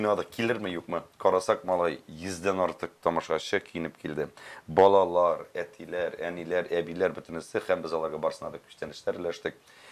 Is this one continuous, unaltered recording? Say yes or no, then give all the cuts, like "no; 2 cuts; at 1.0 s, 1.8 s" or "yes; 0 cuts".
yes; 0 cuts